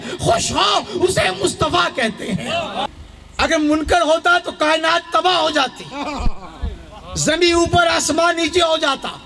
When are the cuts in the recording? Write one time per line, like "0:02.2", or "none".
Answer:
0:02.9